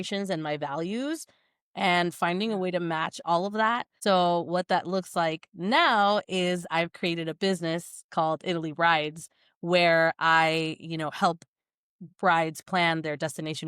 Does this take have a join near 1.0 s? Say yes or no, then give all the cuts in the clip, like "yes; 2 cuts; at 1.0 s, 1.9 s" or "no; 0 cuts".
no; 1 cut; at 3.9 s